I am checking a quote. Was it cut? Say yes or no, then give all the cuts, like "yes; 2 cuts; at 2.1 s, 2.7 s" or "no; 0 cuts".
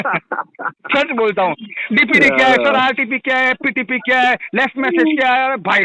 no; 0 cuts